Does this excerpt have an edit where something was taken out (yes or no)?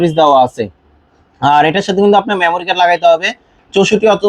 no